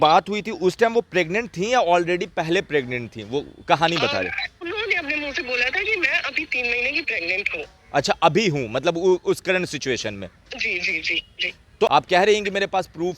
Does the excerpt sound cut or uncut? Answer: cut